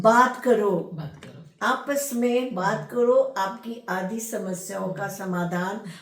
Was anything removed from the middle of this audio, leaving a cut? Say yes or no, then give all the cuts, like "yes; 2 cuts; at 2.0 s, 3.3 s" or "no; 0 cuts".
no; 0 cuts